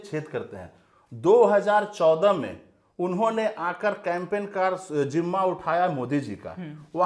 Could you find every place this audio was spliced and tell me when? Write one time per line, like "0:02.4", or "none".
none

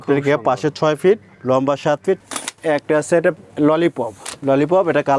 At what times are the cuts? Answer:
0:02.2
0:04.3

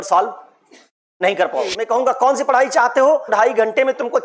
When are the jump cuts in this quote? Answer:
0:01.8
0:03.3

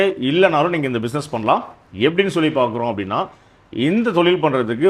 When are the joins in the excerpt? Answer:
none

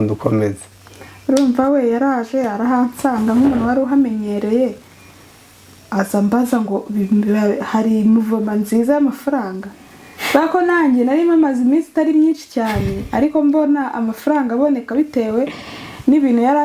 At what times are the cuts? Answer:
none

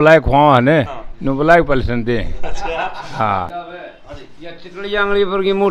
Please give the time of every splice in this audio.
0:03.5

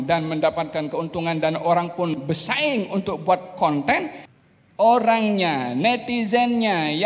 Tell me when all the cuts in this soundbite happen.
0:04.2

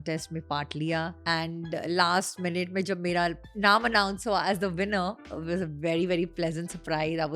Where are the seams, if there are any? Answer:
0:01.2
0:03.4
0:05.3

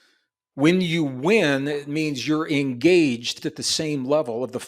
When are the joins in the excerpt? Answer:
0:03.3

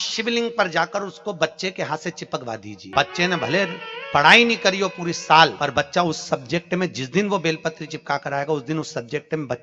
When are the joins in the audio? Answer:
0:02.8
0:05.5

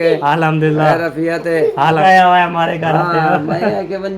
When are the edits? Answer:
0:02.0

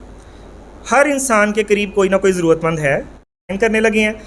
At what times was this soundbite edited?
0:03.4

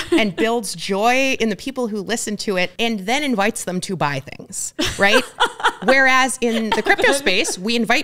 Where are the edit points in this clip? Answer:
0:02.7

